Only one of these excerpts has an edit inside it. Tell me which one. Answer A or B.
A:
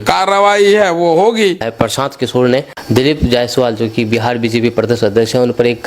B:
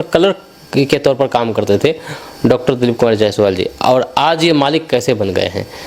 A